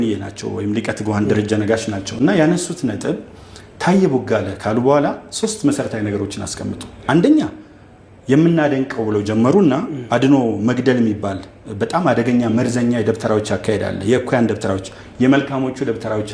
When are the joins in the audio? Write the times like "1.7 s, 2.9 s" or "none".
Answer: none